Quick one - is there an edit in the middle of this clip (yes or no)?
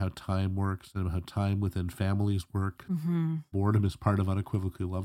no